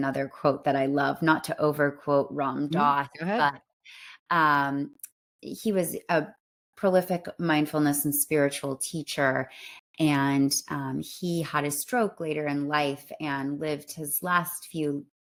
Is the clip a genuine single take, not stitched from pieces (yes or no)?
yes